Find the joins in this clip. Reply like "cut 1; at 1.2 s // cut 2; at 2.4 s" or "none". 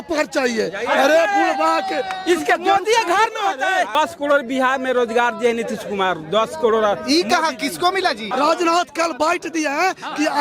cut 1; at 4.0 s // cut 2; at 8.2 s